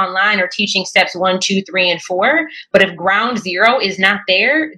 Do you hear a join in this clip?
no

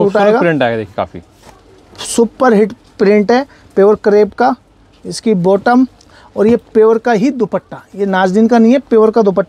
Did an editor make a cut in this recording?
no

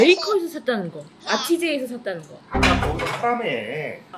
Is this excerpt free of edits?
yes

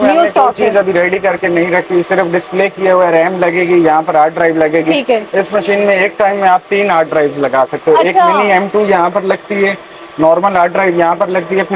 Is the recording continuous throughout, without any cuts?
yes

